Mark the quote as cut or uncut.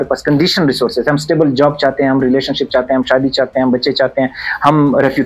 uncut